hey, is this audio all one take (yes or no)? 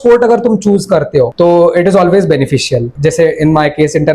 no